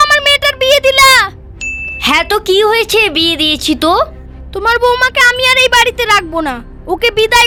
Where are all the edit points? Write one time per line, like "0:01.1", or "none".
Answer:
none